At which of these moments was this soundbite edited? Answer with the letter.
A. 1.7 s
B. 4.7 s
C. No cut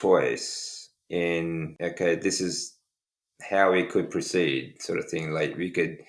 A